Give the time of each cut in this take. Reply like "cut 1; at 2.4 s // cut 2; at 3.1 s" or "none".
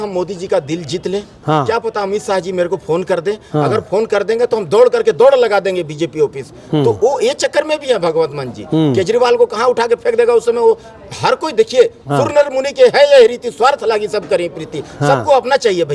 none